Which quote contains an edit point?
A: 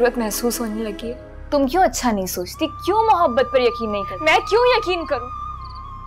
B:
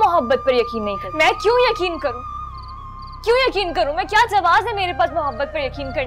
A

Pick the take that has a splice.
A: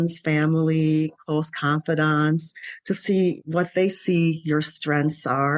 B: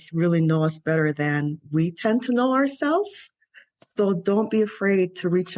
A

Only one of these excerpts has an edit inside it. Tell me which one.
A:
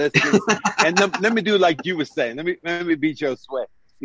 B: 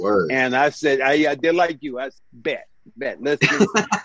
B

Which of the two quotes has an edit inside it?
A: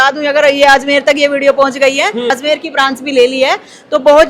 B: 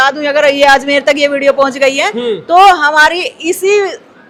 A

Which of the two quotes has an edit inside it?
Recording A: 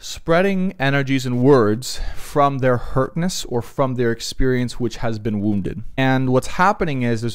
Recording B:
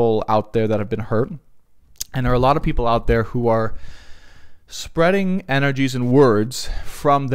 A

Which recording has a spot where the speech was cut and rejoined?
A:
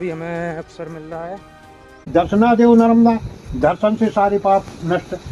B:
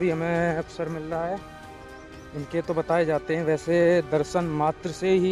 A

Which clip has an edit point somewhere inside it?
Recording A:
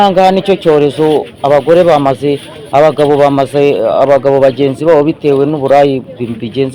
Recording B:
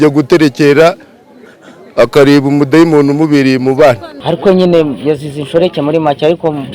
B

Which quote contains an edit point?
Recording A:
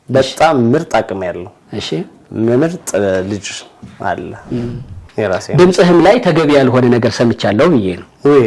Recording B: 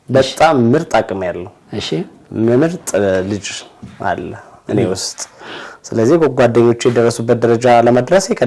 A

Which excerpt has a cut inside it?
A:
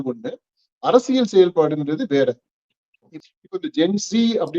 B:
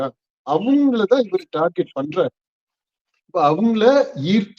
A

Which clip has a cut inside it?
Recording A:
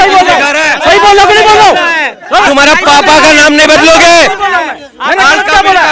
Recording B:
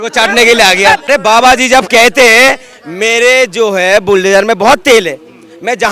B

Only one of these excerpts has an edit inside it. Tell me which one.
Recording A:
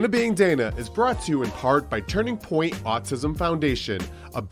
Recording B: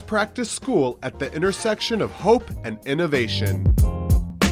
B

